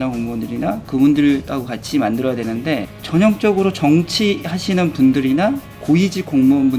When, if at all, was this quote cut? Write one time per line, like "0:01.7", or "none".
0:02.9
0:05.7